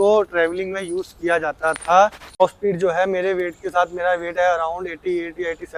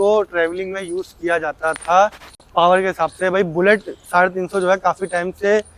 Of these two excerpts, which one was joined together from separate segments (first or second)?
first